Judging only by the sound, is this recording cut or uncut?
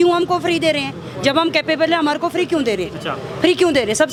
uncut